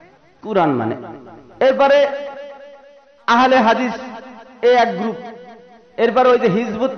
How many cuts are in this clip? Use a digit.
1